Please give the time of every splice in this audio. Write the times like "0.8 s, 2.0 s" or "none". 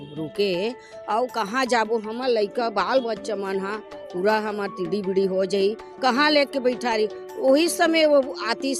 none